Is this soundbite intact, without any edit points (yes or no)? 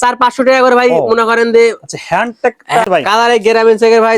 no